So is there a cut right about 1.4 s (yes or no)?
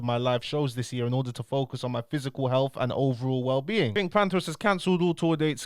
no